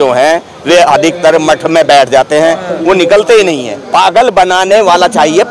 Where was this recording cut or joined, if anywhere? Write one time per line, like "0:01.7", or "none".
0:03.7